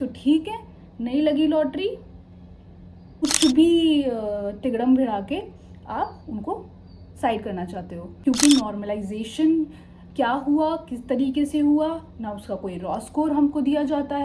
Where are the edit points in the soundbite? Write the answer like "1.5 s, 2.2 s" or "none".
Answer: 3.1 s, 8.0 s